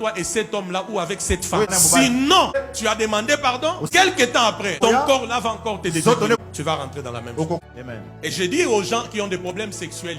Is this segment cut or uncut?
cut